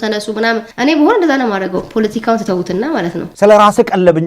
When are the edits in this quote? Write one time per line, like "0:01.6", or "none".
0:03.2

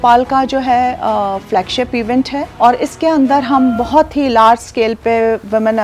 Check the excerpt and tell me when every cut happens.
0:02.5

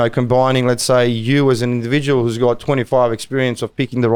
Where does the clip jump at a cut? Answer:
none

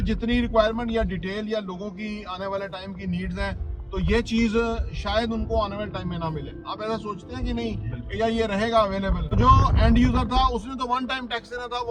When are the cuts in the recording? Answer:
0:09.2

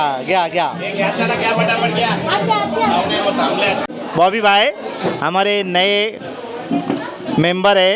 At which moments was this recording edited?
0:03.9

